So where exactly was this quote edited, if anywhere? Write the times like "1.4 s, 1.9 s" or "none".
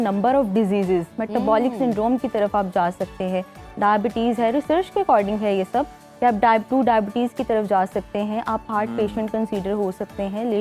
none